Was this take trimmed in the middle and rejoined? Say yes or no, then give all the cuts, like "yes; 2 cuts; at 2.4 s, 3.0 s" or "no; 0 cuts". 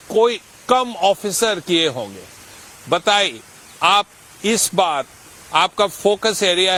no; 0 cuts